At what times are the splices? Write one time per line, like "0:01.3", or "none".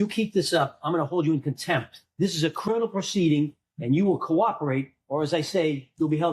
none